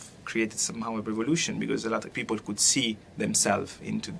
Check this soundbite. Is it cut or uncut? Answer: cut